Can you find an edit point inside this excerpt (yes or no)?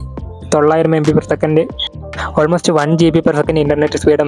no